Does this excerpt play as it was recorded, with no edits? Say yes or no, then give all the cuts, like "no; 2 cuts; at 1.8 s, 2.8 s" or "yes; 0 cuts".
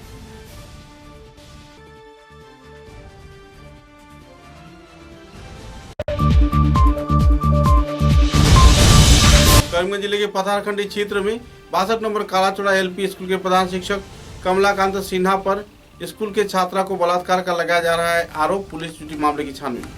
yes; 0 cuts